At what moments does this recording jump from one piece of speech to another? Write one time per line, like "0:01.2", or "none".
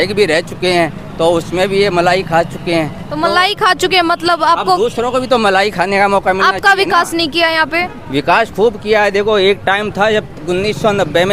none